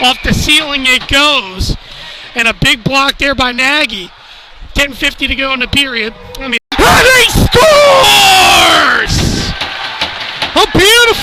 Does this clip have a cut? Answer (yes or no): no